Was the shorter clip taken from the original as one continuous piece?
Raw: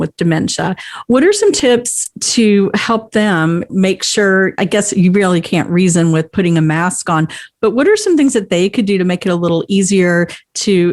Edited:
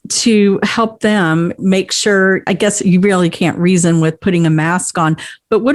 yes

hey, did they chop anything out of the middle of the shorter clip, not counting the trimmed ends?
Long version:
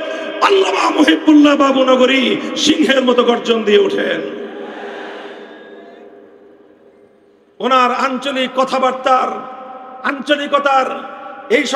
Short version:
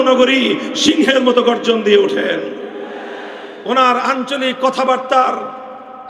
yes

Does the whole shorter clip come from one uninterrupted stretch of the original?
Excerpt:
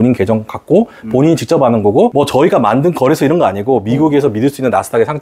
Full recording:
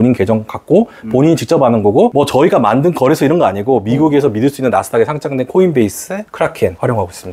yes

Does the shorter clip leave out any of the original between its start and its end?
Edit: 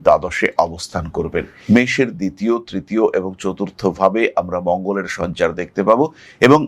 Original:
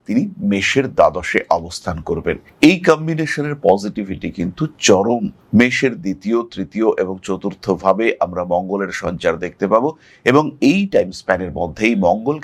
yes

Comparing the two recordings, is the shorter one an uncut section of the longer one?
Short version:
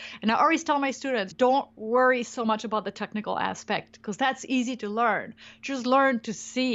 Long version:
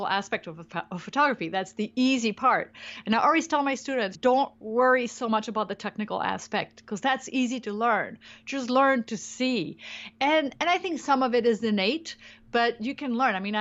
yes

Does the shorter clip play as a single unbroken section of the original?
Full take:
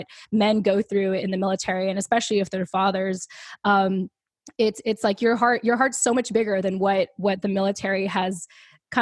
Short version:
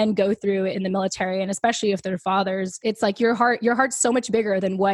no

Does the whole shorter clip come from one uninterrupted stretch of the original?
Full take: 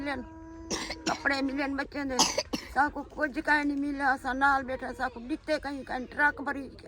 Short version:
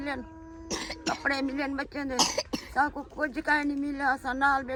yes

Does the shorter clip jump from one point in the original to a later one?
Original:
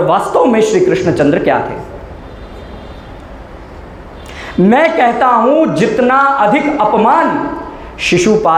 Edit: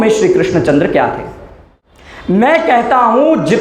yes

